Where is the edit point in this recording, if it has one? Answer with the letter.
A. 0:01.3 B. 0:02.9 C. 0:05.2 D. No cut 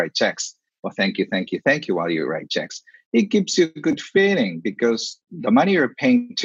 C